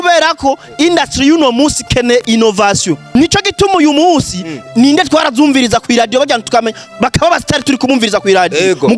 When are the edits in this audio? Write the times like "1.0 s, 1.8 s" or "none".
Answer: 3.0 s